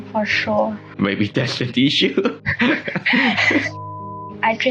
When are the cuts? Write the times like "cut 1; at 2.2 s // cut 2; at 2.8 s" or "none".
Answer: cut 1; at 0.9 s // cut 2; at 2.4 s // cut 3; at 3.8 s